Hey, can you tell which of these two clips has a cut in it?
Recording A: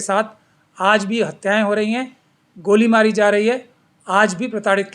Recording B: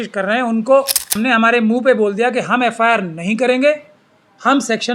B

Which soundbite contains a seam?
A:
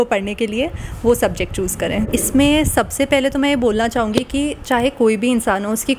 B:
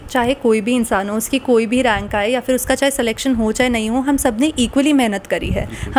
A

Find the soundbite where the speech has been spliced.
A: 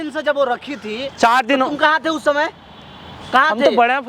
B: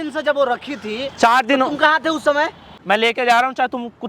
B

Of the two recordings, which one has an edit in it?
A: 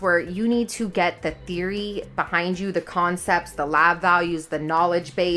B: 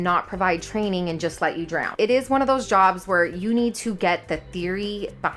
B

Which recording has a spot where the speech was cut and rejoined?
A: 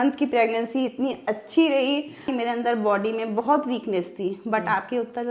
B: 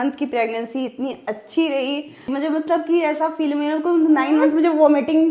A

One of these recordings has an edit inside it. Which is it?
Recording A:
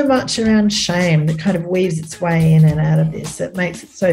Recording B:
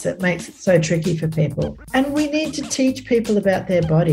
B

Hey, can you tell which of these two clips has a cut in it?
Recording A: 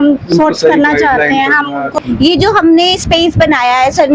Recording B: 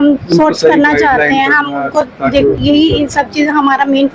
A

